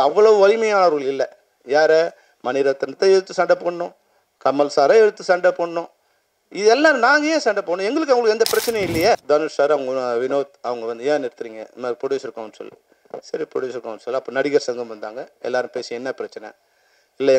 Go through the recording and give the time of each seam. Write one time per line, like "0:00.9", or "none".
0:09.2